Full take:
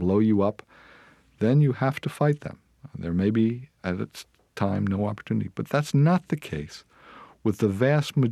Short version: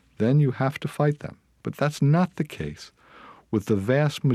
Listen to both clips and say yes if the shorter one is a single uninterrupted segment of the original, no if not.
no